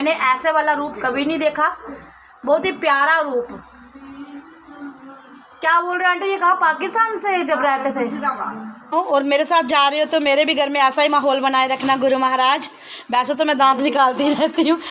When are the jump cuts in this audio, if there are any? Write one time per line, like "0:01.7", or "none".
0:08.9